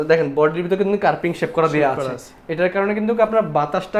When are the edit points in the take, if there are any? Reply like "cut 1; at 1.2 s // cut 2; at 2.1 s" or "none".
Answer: none